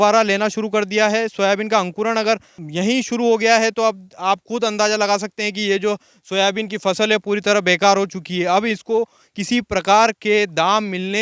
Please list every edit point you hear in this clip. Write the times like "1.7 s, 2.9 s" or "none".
none